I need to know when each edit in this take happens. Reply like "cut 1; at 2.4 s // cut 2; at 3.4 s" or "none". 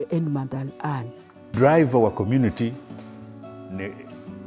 cut 1; at 1.5 s